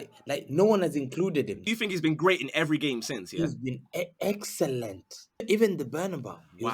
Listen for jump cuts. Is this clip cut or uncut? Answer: cut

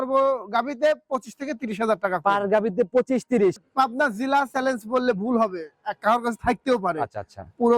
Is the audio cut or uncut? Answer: cut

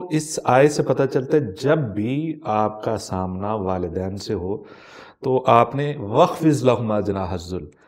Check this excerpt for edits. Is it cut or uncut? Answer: uncut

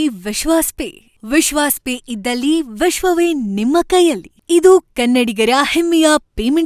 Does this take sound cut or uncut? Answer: uncut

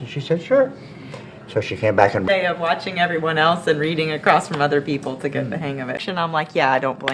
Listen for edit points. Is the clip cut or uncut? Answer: cut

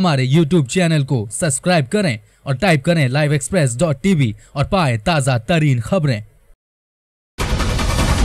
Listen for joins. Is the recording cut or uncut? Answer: cut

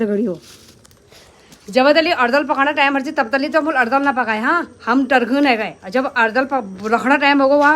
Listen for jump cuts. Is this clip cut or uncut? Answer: uncut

